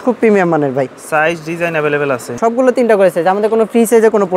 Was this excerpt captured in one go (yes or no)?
no